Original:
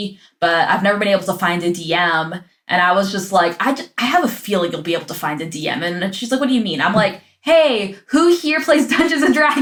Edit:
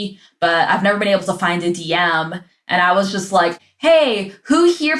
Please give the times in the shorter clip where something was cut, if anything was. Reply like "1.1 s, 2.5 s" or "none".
3.6 s